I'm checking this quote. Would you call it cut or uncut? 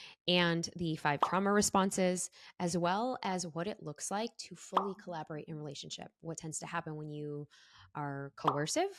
uncut